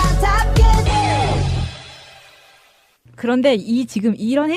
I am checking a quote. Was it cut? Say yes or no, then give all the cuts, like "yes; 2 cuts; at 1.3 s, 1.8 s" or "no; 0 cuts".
yes; 1 cut; at 1.6 s